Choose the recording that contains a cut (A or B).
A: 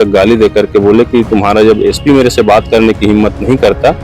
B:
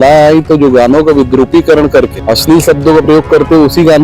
B